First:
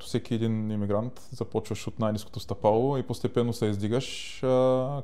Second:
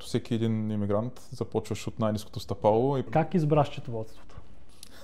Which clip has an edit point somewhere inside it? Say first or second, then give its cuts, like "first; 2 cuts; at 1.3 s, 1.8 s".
second; 1 cut; at 3.1 s